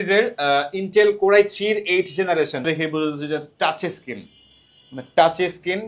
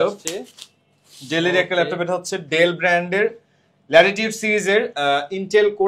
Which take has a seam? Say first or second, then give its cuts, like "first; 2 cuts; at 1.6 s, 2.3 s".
first; 1 cut; at 2.7 s